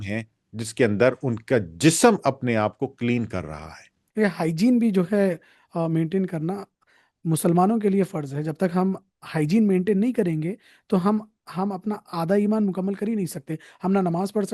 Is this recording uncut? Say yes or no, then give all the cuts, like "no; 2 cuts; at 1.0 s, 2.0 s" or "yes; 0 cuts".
no; 1 cut; at 4.0 s